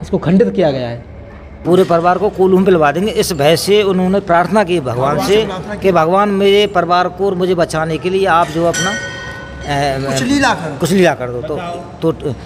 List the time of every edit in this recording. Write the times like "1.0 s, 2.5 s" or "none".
1.5 s